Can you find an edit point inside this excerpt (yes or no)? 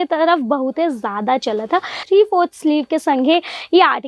yes